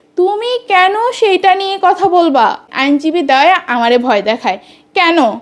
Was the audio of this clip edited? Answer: yes; 1 cut; at 2.7 s

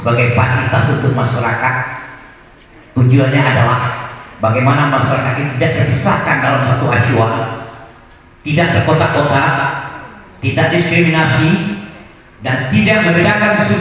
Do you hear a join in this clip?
no; 0 cuts

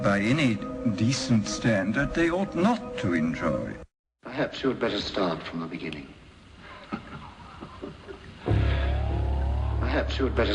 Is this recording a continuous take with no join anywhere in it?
no; 1 cut; at 9.0 s

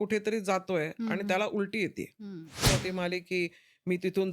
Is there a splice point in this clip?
yes; 1 cut; at 2.6 s

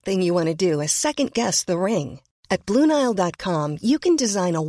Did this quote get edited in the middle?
no; 0 cuts

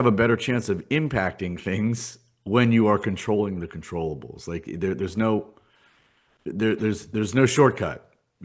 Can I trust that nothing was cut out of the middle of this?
yes; 0 cuts

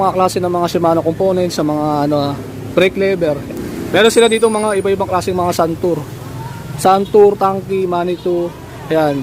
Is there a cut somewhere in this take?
yes; 1 cut; at 3.5 s

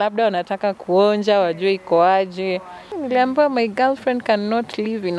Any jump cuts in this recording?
yes; 1 cut; at 2.9 s

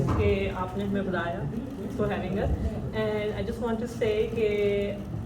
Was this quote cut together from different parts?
no; 0 cuts

